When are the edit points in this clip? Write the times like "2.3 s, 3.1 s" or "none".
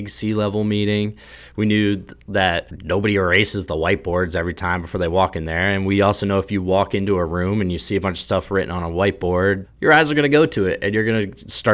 2.7 s, 9.6 s